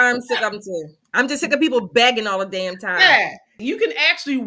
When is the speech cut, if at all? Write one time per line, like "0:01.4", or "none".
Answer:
0:03.5